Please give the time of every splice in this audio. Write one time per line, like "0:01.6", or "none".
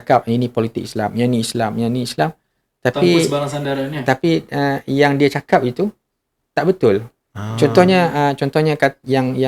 none